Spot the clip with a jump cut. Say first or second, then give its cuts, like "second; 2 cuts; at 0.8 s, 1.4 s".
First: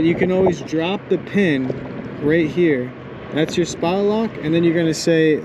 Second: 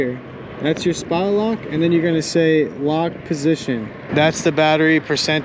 second; 1 cut; at 4.0 s